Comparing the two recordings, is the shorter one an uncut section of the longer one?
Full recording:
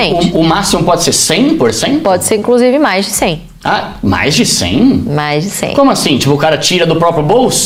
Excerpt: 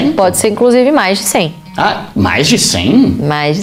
yes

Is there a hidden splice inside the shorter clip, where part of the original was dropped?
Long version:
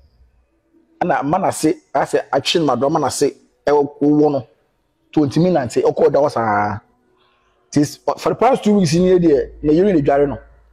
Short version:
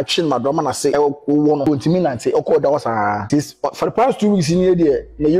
yes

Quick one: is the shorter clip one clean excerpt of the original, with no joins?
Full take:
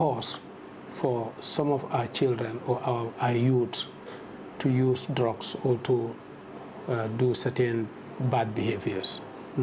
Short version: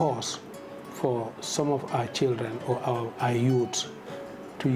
yes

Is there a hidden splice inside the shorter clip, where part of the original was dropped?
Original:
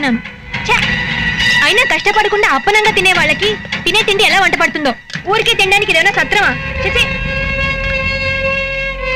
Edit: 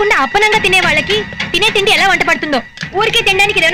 no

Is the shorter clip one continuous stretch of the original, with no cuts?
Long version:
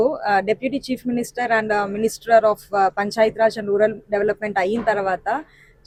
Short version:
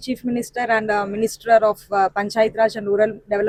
yes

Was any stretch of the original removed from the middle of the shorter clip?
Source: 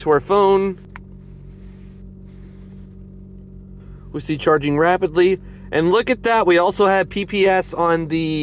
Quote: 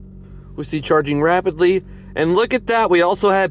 no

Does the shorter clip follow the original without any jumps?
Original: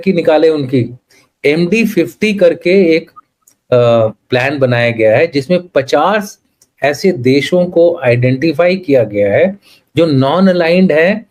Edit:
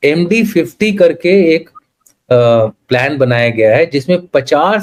yes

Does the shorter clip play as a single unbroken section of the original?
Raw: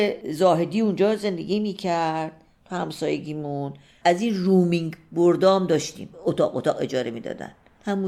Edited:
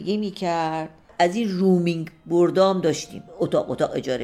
no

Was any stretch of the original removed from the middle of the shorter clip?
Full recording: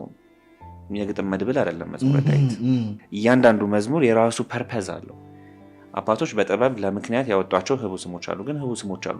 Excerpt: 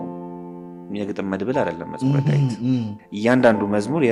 no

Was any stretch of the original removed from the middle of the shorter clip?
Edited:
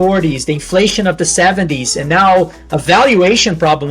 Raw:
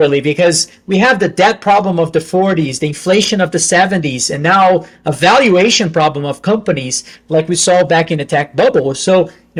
no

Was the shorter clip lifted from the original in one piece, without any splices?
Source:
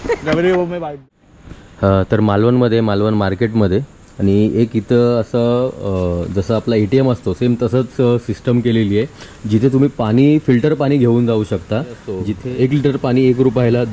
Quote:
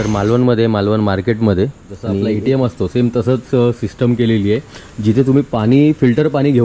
no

